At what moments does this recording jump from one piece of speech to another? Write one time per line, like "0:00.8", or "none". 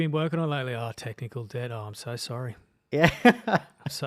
none